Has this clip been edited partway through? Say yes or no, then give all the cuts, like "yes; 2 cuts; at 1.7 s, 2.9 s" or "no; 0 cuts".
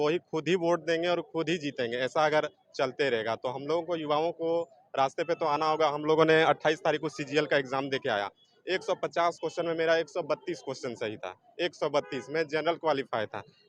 no; 0 cuts